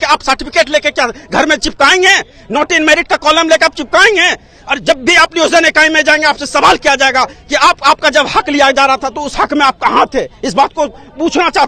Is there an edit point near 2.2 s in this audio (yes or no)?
no